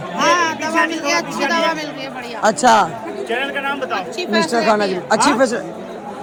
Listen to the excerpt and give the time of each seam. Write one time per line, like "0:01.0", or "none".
none